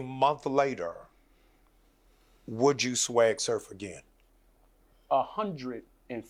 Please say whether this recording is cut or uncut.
uncut